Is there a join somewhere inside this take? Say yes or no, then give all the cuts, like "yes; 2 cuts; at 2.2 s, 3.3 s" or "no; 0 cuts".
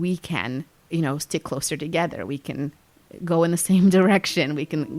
no; 0 cuts